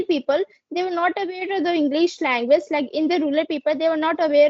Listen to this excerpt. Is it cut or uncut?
uncut